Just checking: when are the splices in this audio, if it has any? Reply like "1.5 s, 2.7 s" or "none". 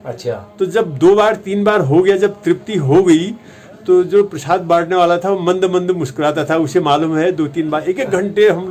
none